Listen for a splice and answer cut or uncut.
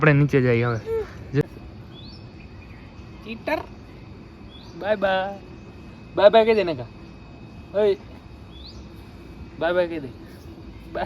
cut